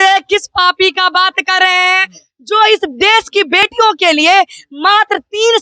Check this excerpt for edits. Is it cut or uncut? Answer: uncut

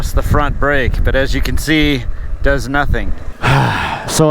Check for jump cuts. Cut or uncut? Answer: cut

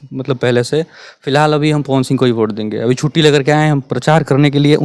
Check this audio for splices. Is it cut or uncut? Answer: uncut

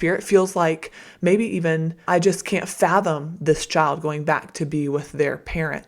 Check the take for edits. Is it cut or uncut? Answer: cut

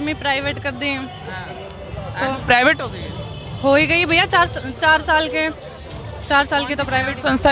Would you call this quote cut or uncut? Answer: uncut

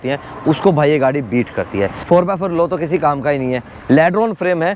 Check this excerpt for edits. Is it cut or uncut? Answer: cut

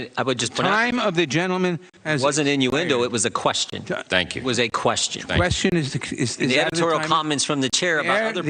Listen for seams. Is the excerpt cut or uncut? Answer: uncut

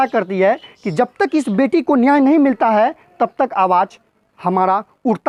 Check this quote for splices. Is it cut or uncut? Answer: uncut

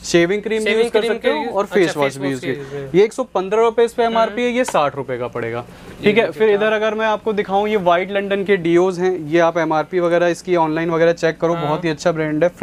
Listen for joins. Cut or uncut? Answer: uncut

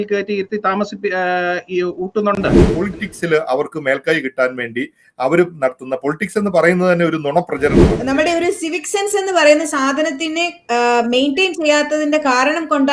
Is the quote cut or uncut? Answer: cut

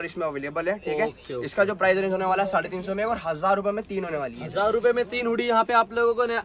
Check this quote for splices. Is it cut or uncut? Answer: uncut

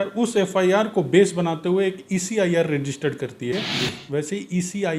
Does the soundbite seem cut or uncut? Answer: cut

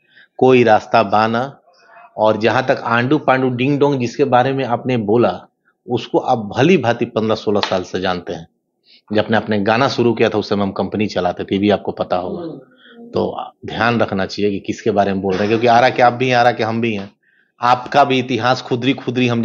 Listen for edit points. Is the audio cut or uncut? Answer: uncut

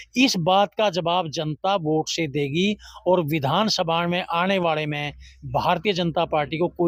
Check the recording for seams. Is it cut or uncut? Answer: uncut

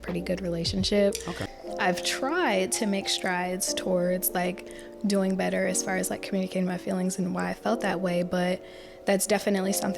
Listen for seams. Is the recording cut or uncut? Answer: cut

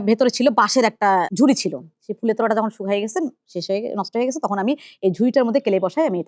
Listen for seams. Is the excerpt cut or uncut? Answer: uncut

